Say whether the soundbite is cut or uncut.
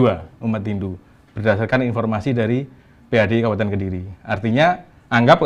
uncut